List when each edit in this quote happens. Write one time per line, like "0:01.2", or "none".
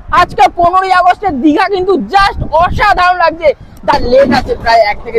0:03.9